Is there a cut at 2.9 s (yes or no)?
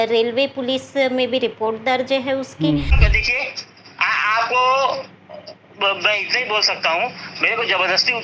yes